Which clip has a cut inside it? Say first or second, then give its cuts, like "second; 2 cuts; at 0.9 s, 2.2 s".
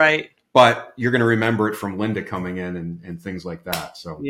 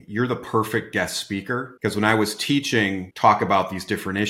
second; 2 cuts; at 1.7 s, 3.1 s